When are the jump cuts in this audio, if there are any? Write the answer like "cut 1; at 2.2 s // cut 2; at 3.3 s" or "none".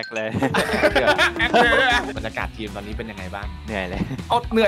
cut 1; at 2.1 s